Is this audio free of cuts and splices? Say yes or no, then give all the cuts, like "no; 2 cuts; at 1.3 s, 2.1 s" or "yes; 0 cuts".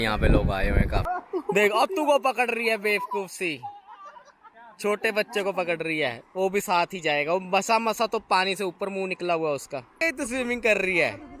no; 2 cuts; at 1.0 s, 10.0 s